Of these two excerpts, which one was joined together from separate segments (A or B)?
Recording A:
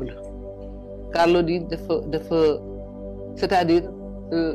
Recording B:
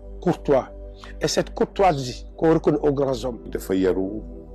B